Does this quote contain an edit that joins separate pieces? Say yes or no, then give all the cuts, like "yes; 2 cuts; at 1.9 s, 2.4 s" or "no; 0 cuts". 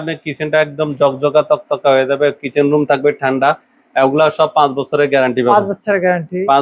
no; 0 cuts